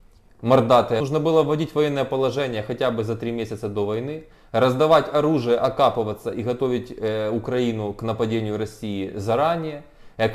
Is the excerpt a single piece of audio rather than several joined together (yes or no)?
no